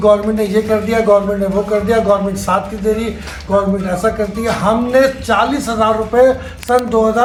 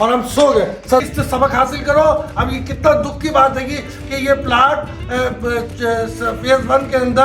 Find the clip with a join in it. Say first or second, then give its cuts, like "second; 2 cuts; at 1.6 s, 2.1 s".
second; 1 cut; at 1.0 s